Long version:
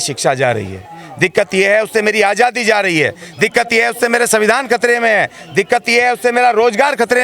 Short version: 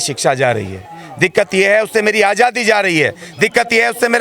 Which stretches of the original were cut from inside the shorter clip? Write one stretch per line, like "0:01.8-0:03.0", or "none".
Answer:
none